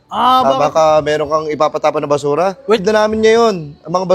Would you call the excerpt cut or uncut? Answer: cut